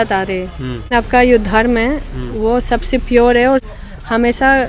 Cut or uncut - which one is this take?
cut